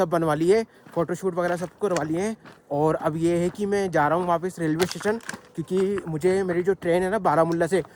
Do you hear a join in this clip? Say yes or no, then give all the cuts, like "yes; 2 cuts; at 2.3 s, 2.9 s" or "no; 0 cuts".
no; 0 cuts